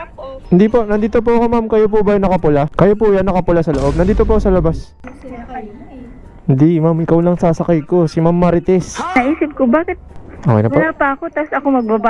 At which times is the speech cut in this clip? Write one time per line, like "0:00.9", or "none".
0:02.7
0:05.0
0:09.0